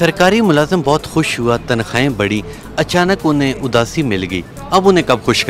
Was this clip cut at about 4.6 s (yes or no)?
no